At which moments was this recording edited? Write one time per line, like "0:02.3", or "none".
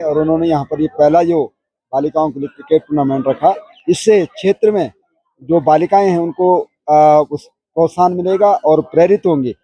none